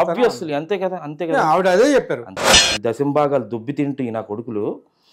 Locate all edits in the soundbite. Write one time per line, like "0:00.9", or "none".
0:02.6